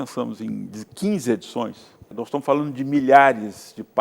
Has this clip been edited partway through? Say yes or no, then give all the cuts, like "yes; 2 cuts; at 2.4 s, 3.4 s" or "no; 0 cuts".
yes; 1 cut; at 2.1 s